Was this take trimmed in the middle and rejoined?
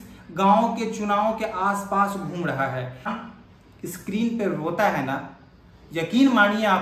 yes; 1 cut; at 3.1 s

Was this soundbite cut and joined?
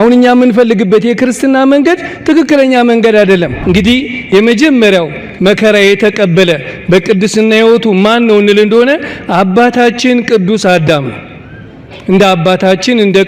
yes; 1 cut; at 3.5 s

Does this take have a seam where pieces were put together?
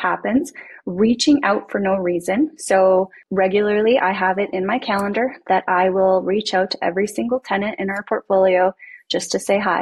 yes; 1 cut; at 3.2 s

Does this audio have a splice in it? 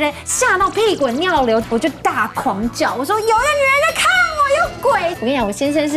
yes; 2 cuts; at 1.6 s, 5.1 s

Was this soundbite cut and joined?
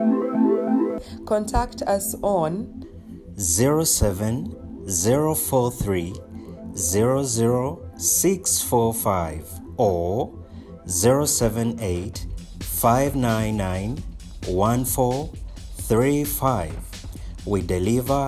yes; 1 cut; at 0.9 s

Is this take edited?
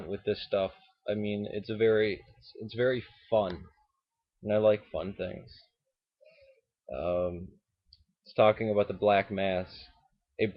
yes; 1 cut; at 1.8 s

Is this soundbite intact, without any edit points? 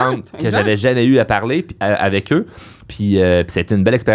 yes; 0 cuts

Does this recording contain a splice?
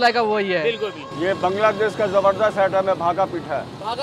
yes; 1 cut; at 1.0 s

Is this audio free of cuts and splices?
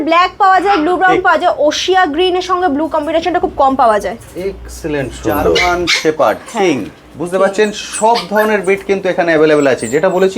no; 1 cut; at 5.6 s

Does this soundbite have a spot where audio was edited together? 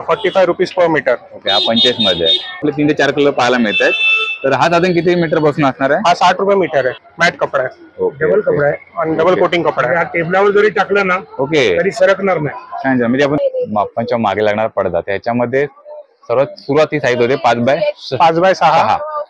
yes; 3 cuts; at 2.6 s, 7.0 s, 13.4 s

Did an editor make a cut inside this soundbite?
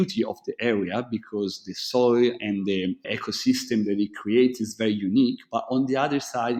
no; 0 cuts

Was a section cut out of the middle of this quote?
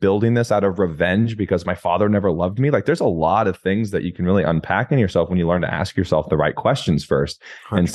no; 0 cuts

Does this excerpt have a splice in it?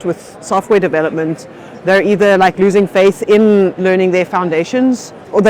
no; 0 cuts

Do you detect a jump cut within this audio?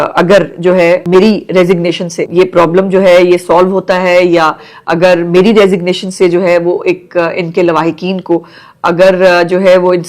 yes; 2 cuts; at 1.0 s, 2.2 s

